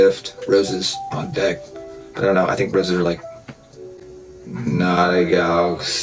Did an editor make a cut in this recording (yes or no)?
no